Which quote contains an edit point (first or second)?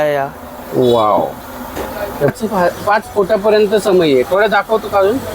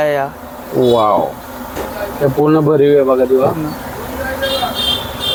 first